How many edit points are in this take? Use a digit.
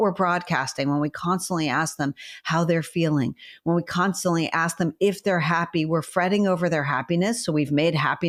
0